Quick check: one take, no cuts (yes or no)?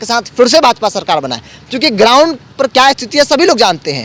yes